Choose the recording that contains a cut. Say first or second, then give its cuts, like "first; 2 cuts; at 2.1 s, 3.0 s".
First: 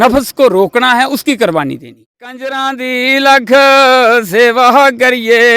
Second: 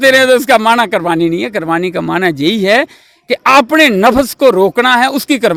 first; 1 cut; at 2.5 s